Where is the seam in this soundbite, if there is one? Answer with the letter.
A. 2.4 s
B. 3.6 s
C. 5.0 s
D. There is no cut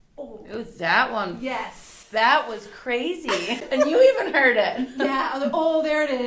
B